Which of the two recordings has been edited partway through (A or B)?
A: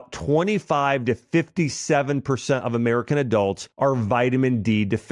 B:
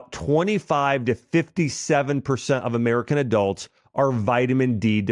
A